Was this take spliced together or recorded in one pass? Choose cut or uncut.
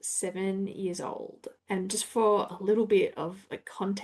uncut